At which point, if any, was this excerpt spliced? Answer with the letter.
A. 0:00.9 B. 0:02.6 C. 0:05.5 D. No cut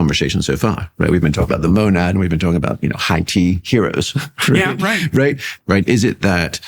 C